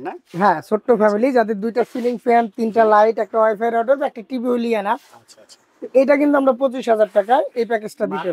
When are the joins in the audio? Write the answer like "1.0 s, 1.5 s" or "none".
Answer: none